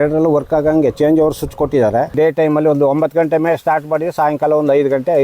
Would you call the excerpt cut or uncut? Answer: cut